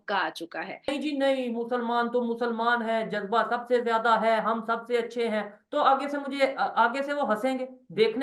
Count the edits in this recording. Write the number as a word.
one